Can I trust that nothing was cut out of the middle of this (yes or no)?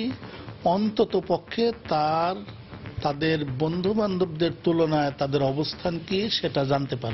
yes